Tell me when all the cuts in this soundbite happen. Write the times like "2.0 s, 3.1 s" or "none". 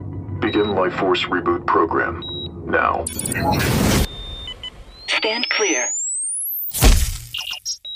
none